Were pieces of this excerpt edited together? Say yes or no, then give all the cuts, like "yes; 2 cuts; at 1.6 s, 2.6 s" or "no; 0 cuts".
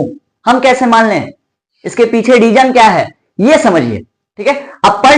no; 0 cuts